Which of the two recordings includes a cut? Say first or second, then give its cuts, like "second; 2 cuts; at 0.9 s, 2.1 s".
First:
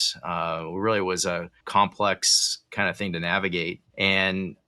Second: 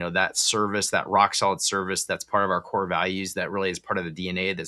first; 2 cuts; at 1.5 s, 3.8 s